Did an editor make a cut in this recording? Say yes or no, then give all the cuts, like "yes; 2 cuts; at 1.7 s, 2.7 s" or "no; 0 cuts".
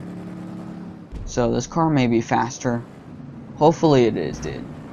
no; 0 cuts